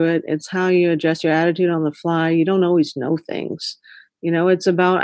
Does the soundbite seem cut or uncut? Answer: uncut